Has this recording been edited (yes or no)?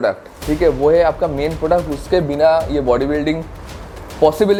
no